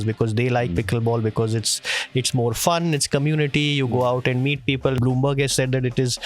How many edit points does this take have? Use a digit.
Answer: 1